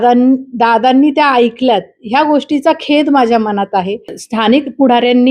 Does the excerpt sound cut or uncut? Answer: cut